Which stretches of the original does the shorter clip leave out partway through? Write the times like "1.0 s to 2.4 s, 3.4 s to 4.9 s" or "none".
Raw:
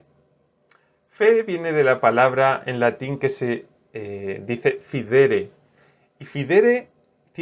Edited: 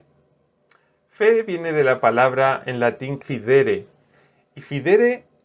3.1 s to 4.8 s